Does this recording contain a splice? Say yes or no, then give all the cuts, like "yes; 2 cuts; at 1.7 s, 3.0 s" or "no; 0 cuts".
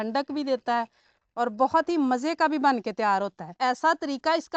yes; 1 cut; at 3.5 s